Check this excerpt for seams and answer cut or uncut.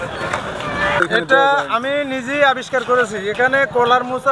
cut